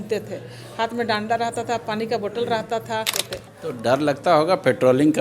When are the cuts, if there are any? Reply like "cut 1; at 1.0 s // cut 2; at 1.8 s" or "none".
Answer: cut 1; at 3.2 s